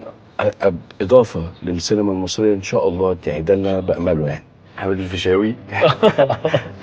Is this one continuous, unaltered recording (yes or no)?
no